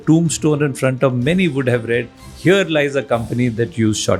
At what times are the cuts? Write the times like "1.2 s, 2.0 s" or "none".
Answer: none